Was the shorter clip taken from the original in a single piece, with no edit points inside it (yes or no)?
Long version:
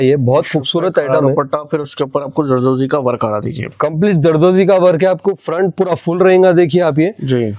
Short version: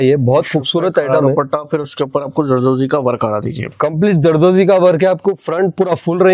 yes